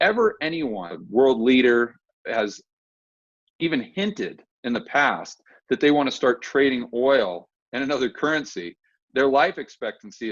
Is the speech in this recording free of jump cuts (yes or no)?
no